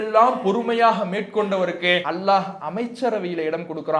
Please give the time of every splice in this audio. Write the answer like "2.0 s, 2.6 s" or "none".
2.1 s